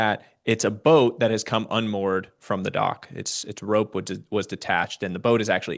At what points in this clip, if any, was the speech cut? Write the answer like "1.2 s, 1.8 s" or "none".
none